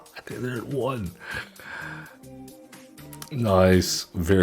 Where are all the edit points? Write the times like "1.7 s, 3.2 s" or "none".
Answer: 2.1 s

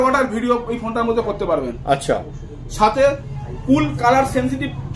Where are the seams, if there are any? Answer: none

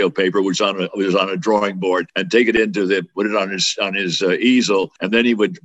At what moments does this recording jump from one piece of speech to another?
2.1 s

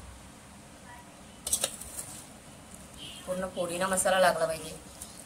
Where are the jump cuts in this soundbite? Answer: 1.2 s

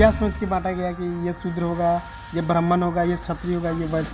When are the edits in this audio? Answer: none

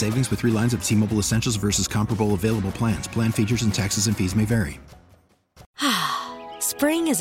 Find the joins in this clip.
5.6 s

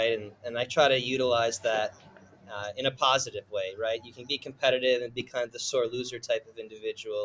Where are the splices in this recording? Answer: none

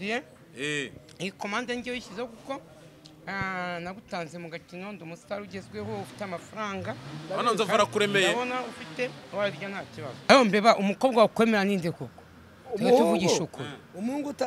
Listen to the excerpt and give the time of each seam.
10.3 s

